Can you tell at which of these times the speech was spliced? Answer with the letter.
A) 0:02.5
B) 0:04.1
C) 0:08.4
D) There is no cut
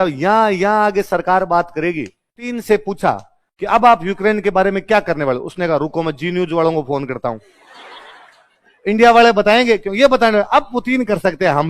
A